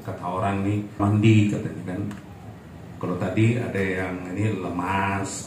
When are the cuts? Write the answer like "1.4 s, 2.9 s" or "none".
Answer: 1.0 s